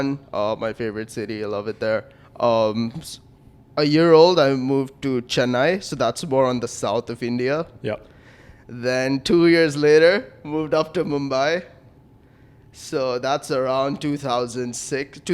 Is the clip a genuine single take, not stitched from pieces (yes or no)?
yes